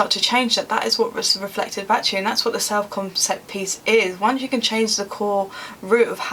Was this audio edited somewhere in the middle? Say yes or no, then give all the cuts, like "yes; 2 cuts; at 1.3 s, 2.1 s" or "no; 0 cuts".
no; 0 cuts